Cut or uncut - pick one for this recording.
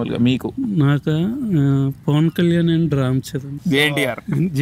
cut